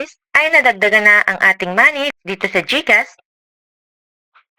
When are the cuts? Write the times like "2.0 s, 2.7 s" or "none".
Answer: 2.2 s